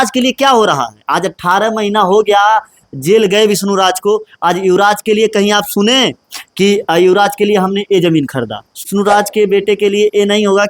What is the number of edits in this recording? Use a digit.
1